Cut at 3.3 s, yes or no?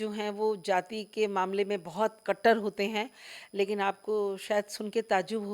no